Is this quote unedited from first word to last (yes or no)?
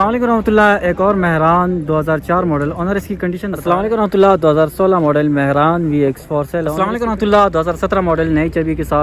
no